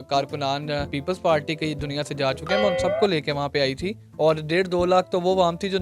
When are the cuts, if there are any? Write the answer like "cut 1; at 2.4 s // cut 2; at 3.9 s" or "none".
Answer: cut 1; at 0.9 s